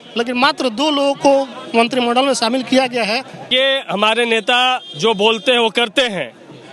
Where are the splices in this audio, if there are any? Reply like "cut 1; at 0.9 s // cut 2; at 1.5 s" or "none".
cut 1; at 3.4 s